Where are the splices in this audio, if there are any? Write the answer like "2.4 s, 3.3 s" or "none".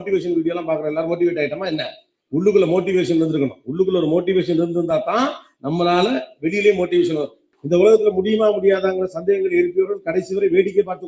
7.5 s